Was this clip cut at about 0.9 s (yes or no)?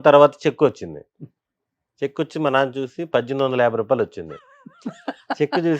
no